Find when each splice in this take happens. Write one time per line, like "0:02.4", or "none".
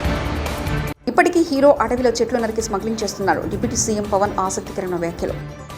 0:00.9